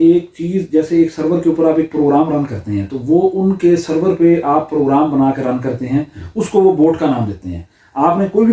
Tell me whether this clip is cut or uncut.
uncut